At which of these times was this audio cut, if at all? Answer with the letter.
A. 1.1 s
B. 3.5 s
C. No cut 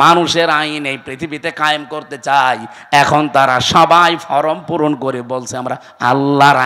C